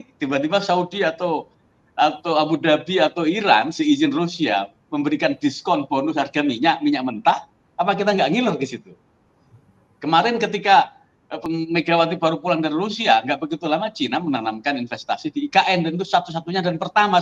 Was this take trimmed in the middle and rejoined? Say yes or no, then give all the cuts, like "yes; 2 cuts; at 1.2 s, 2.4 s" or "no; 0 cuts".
yes; 1 cut; at 11.4 s